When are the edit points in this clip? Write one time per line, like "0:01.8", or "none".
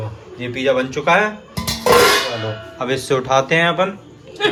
none